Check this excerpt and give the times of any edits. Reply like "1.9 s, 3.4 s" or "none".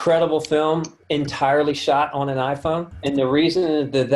0.9 s, 2.9 s